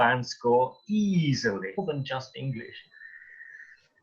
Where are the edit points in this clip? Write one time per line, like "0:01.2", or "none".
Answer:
0:01.8